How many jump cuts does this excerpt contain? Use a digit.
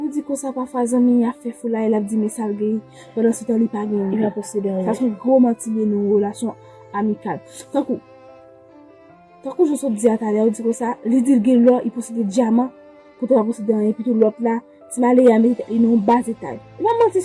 0